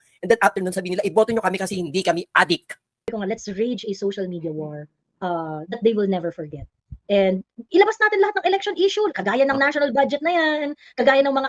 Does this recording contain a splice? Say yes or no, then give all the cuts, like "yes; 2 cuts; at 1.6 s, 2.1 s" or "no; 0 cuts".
yes; 1 cut; at 3.1 s